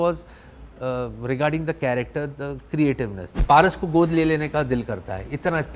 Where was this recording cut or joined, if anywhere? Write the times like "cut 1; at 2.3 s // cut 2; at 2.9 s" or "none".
cut 1; at 3.3 s